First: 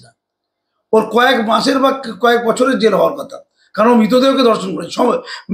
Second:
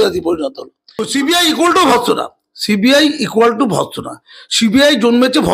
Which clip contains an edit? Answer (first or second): second